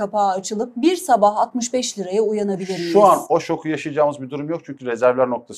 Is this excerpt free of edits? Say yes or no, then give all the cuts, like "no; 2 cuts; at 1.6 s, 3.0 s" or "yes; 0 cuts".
yes; 0 cuts